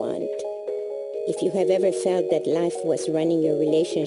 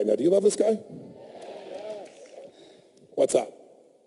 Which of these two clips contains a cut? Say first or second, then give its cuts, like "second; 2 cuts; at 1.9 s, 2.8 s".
first; 1 cut; at 1.4 s